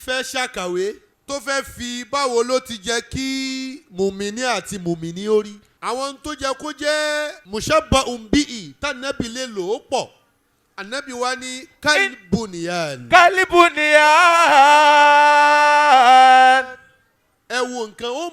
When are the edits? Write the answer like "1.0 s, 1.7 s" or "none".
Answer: 1.1 s, 5.6 s, 7.4 s